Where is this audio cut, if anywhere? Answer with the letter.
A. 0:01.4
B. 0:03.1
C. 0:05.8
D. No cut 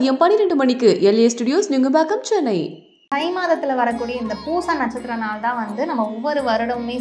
B